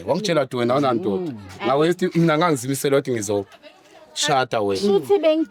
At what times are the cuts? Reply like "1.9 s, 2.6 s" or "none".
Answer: none

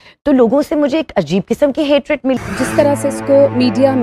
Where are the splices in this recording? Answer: 2.4 s

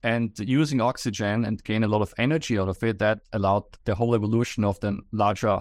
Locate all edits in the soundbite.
none

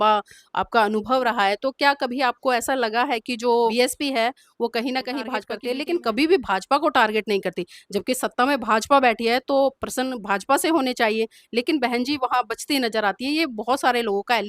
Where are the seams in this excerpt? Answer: 3.7 s, 5.6 s

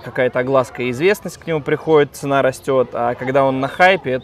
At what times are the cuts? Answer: none

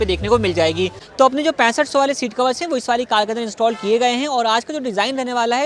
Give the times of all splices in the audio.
1.0 s

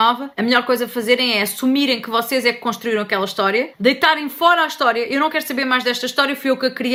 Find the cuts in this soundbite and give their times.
none

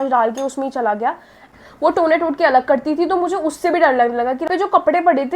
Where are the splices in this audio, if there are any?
1.6 s, 4.5 s

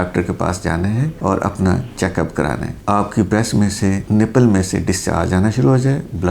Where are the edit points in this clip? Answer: 2.7 s

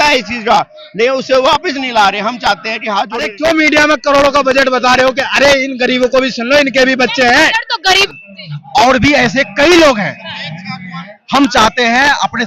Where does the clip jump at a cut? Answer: 3.3 s, 8.1 s

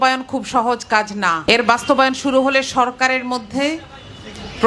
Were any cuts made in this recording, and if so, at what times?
1.4 s

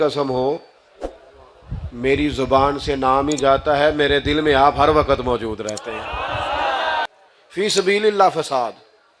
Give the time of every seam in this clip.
7.1 s

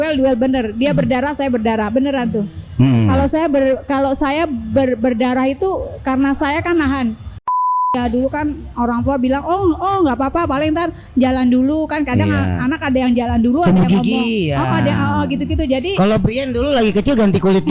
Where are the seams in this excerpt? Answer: 7.7 s

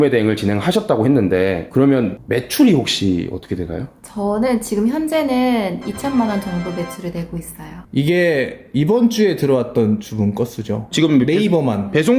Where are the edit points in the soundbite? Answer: 7.8 s

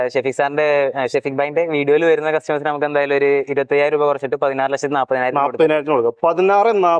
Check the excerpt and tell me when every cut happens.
none

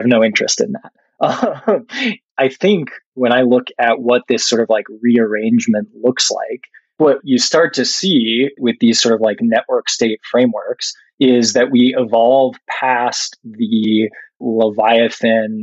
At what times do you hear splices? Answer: 2.2 s, 7.0 s, 8.6 s, 14.4 s

